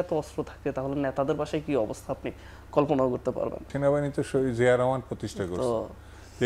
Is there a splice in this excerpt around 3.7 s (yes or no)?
yes